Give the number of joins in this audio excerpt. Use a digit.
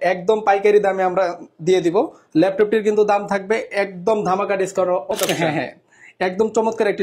1